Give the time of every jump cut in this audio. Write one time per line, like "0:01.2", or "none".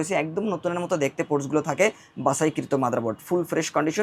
none